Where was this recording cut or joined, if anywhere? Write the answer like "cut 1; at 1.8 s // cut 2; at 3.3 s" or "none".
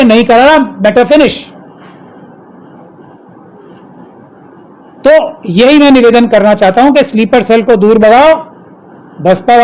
none